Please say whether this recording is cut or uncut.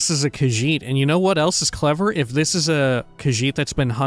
cut